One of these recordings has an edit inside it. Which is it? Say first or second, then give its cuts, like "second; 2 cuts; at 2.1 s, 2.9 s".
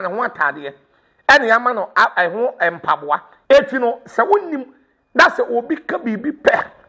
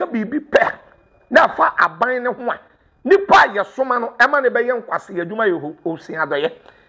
first; 1 cut; at 3.3 s